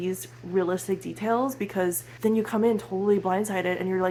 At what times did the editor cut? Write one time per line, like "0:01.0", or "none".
none